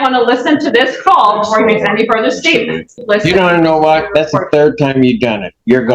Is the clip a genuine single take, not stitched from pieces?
no; 1 cut; at 3.0 s

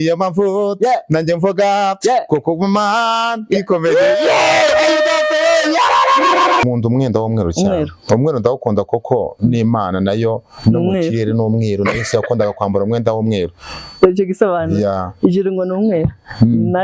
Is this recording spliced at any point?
yes; 1 cut; at 6.6 s

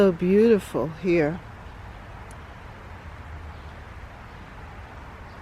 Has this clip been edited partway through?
no; 0 cuts

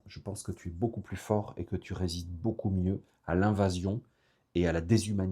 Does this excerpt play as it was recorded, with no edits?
yes; 0 cuts

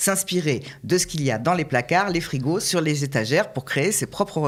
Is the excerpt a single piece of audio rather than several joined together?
yes; 0 cuts

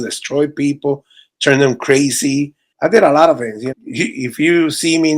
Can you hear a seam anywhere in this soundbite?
yes; 2 cuts; at 2.6 s, 3.7 s

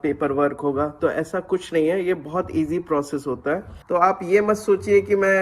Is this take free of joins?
no; 1 cut; at 3.7 s

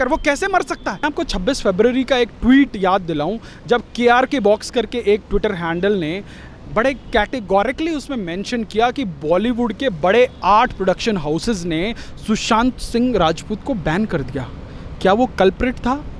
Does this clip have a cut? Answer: yes; 1 cut; at 1.0 s

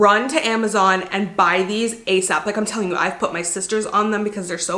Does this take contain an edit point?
no; 0 cuts

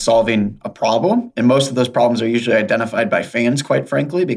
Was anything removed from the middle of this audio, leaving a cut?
no; 0 cuts

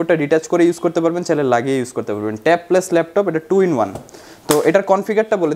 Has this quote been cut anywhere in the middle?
no; 0 cuts

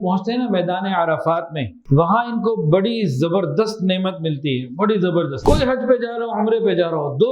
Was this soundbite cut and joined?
yes; 2 cuts; at 1.7 s, 5.4 s

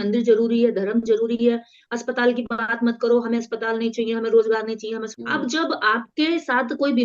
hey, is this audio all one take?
no; 1 cut; at 5.1 s

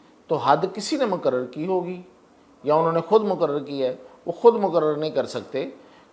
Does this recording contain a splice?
no; 0 cuts

